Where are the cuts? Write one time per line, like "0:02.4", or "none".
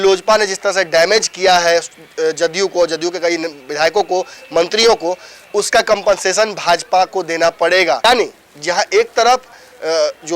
0:08.1